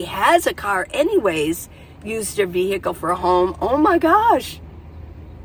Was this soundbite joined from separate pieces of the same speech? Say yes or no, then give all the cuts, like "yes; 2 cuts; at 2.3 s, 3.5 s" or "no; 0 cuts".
no; 0 cuts